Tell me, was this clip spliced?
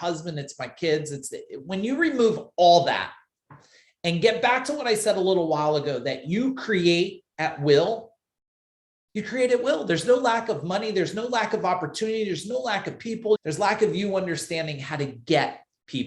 yes; 1 cut; at 13.4 s

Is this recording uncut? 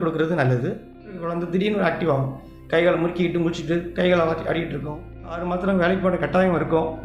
no; 2 cuts; at 1.3 s, 5.4 s

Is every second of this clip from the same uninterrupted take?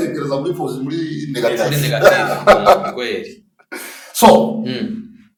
yes; 0 cuts

